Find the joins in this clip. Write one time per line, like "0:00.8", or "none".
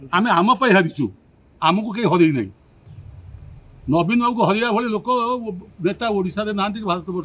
none